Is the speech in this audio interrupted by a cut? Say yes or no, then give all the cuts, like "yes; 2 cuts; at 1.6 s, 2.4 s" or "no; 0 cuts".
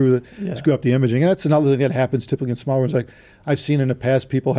no; 0 cuts